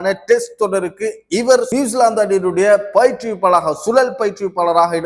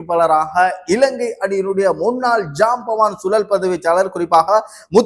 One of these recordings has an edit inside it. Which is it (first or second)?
first